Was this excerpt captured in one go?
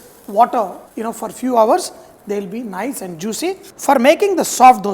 no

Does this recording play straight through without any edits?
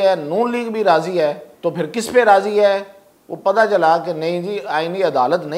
no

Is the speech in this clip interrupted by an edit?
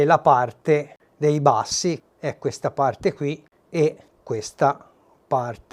yes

